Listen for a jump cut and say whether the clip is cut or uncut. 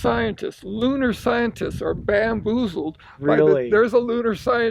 uncut